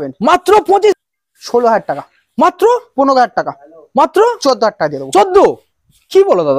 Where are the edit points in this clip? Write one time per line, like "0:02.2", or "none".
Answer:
0:00.9